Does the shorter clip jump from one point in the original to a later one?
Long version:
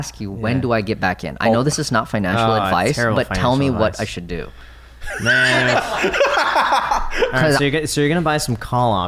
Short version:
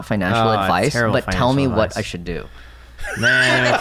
no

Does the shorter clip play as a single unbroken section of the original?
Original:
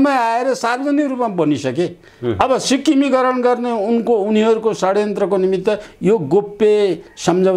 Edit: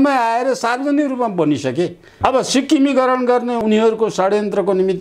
no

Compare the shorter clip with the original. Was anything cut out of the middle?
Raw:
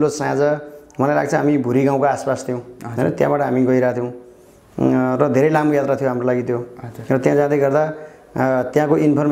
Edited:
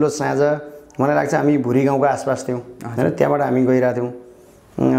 no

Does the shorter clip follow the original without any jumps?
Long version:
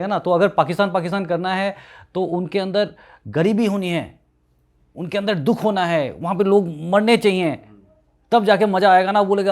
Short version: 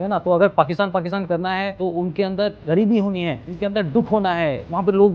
no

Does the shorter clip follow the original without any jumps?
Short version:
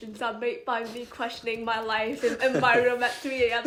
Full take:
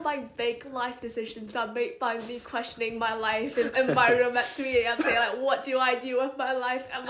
yes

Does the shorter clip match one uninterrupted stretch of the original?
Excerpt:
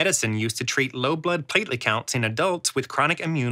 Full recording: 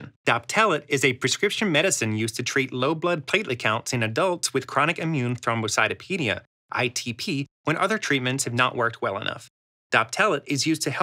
yes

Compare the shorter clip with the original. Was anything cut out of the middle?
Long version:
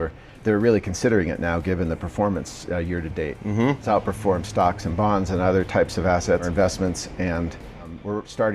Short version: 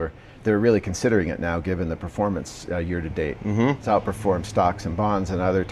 no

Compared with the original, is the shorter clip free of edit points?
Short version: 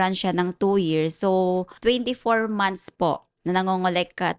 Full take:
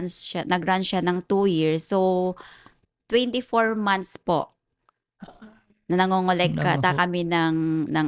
no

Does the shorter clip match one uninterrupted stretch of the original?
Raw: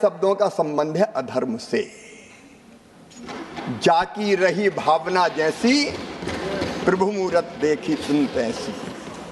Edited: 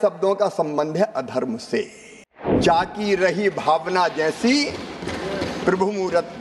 no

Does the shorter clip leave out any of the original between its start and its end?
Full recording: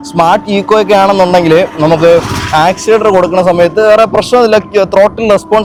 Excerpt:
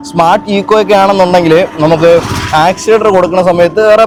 no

